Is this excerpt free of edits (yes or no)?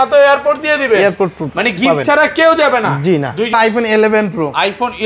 no